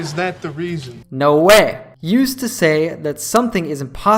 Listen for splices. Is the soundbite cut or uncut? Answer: uncut